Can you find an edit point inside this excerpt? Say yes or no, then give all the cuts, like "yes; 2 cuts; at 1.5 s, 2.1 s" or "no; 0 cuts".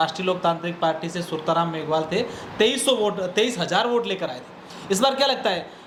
no; 0 cuts